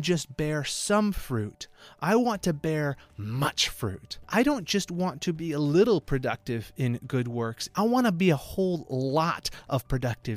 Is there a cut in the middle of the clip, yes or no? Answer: yes